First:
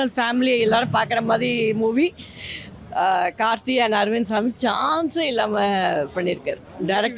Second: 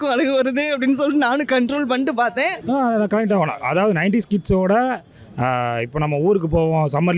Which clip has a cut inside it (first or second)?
second